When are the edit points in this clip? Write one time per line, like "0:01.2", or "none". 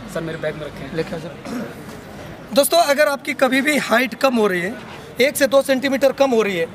0:01.2
0:02.3
0:05.0